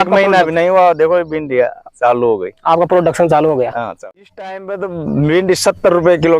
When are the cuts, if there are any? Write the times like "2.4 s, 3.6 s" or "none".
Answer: 3.8 s